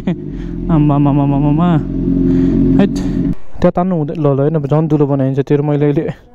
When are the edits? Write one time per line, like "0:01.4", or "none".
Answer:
0:03.5